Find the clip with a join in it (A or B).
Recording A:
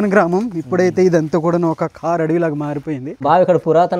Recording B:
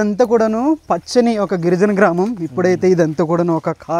A